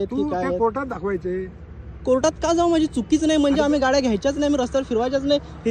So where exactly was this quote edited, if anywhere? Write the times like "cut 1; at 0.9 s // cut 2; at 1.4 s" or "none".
none